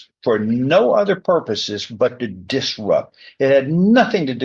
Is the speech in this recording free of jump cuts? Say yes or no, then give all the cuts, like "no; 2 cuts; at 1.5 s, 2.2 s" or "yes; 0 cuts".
yes; 0 cuts